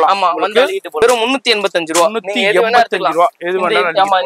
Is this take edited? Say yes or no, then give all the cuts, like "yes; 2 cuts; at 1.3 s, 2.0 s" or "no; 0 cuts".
yes; 1 cut; at 1.0 s